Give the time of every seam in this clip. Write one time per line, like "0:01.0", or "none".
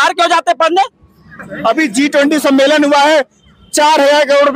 none